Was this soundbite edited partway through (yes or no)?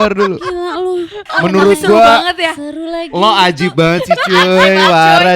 yes